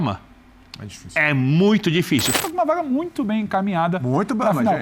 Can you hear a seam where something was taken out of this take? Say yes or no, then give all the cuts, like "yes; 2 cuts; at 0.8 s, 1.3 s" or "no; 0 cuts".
yes; 1 cut; at 2.4 s